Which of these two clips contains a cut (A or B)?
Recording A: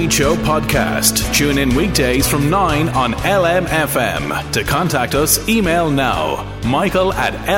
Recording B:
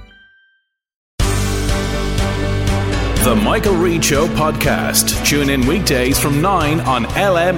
B